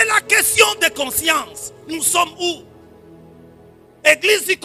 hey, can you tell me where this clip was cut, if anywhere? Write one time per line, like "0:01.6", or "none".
none

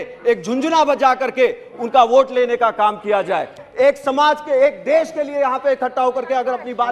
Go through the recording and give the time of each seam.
0:03.5

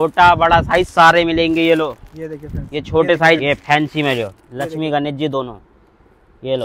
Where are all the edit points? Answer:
0:03.4

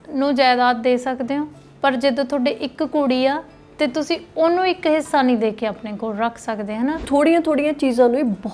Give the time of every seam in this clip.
0:07.0

